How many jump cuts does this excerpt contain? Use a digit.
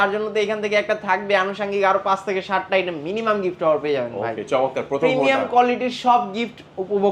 0